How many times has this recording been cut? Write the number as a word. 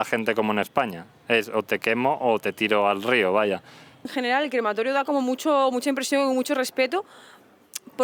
one